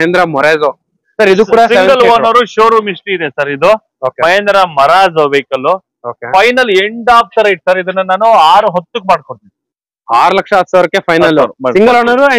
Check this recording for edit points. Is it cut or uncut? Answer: uncut